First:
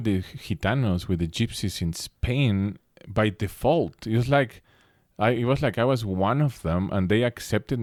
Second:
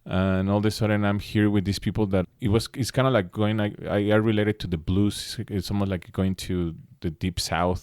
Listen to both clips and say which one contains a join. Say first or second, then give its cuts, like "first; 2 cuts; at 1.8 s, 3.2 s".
second; 1 cut; at 2.3 s